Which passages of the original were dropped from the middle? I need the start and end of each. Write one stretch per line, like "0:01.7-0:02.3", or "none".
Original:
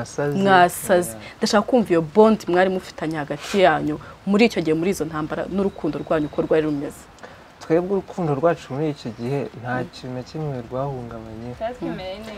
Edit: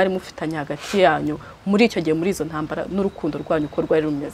none